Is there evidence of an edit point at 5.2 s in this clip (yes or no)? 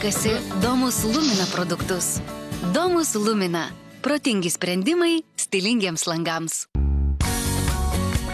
no